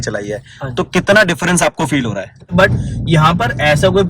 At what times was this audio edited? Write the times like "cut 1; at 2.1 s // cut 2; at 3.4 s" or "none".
cut 1; at 2.5 s